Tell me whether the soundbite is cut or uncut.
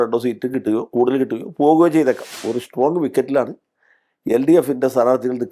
cut